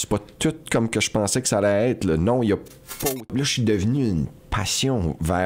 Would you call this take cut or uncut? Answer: cut